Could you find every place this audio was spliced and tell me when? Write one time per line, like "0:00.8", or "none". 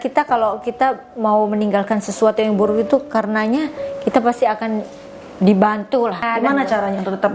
0:06.2